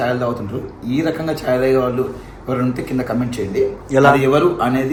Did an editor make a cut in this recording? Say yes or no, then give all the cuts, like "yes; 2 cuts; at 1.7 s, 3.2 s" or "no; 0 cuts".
no; 0 cuts